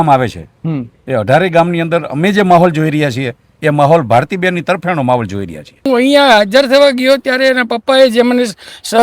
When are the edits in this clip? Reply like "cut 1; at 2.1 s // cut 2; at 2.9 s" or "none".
cut 1; at 5.9 s